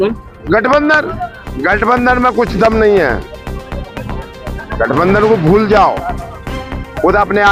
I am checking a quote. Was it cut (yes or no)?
no